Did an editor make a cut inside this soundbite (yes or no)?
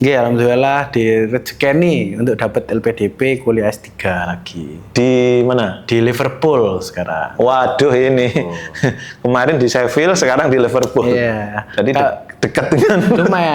no